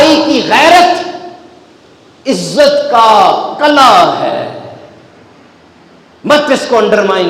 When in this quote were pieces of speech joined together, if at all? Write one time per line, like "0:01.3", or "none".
none